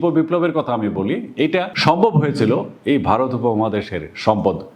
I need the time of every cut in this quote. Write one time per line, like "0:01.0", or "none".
0:01.7